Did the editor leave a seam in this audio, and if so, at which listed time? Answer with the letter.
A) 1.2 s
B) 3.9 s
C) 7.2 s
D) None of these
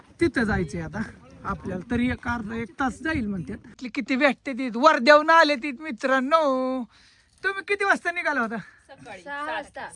B